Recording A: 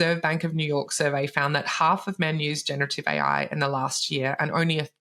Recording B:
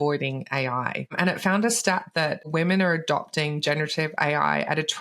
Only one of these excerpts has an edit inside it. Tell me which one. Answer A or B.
B